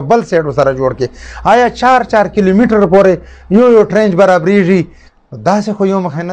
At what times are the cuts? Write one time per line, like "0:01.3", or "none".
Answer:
0:05.0